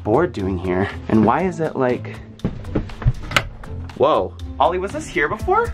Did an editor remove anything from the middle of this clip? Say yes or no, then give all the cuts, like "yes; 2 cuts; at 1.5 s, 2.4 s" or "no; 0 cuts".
no; 0 cuts